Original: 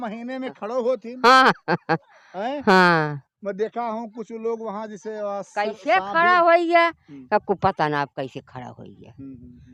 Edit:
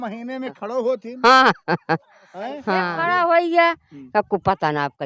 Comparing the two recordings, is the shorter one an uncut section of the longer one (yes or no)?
no